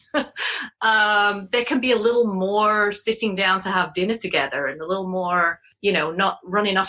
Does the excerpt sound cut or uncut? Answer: cut